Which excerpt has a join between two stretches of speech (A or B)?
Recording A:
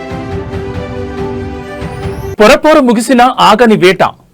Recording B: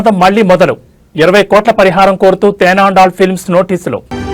A